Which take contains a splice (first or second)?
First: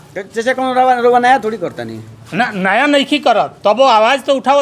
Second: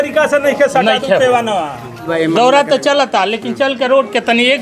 second